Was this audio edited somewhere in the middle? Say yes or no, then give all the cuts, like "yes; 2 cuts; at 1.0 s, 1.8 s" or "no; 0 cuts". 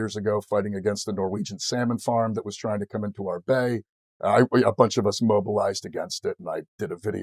no; 0 cuts